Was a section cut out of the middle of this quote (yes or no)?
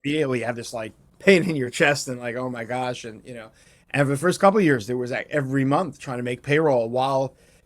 yes